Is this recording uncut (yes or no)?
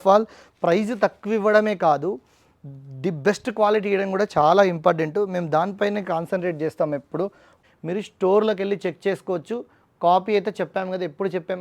no